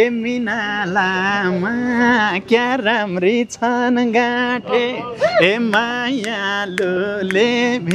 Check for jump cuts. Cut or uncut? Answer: uncut